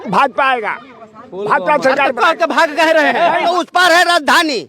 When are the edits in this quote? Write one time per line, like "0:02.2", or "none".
0:03.4